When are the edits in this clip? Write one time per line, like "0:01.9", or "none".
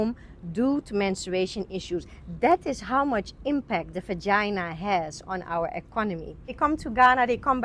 0:06.5